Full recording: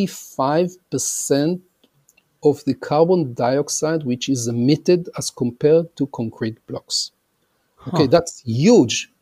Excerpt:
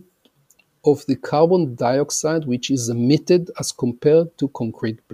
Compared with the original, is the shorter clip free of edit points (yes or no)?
yes